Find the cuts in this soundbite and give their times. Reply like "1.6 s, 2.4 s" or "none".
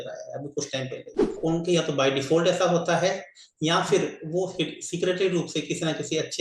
1.4 s